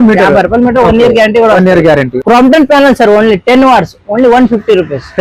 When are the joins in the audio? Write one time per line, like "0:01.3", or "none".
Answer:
0:02.1